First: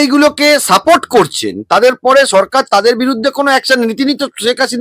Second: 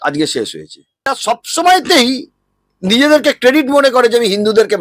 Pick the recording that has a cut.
second; 1 cut; at 1.2 s

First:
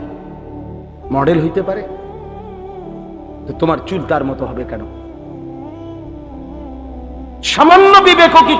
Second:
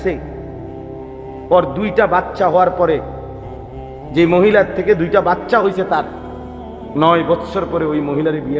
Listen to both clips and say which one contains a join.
first; 4 cuts; at 2.2 s, 3.5 s, 5.2 s, 6.8 s

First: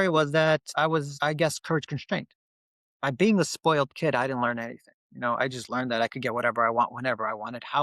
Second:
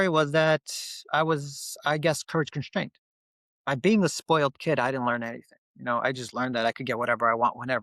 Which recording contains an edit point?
first; 1 cut; at 0.9 s

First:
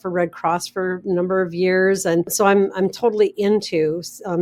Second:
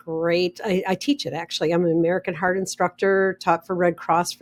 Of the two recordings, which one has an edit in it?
first; 1 cut; at 2.3 s

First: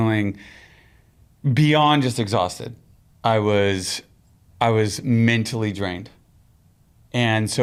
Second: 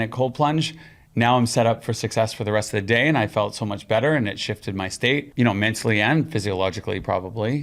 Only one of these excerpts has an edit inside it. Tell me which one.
second; 1 cut; at 5.3 s

